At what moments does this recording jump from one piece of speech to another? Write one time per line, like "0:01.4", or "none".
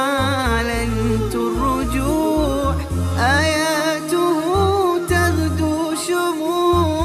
none